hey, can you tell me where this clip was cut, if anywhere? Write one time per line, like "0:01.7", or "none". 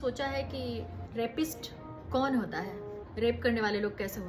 0:01.0
0:02.0
0:03.0

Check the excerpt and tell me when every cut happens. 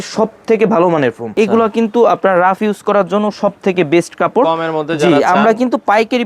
0:01.2

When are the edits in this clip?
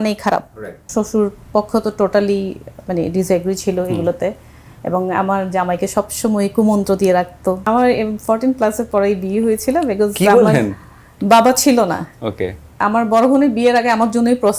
0:00.9
0:07.6
0:12.8

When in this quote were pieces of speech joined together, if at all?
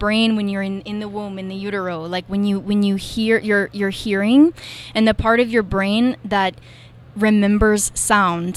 none

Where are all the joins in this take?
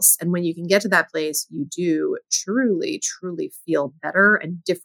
none

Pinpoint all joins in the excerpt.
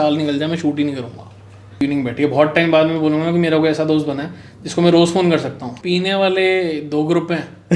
0:01.8
0:05.7

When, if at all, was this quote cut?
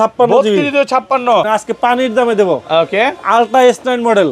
0:01.5

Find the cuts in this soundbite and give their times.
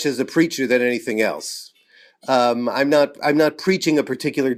none

